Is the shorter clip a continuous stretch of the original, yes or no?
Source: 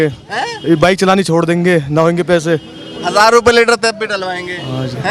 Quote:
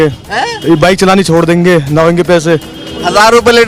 yes